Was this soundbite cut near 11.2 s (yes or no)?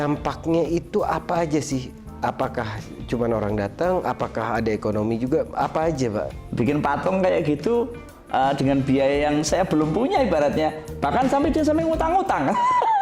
no